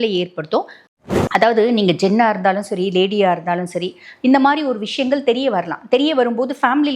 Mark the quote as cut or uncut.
cut